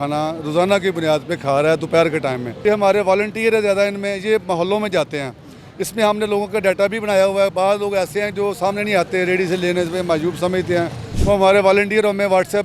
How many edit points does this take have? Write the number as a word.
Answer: two